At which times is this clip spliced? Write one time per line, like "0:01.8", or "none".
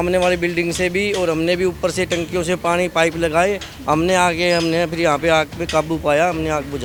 none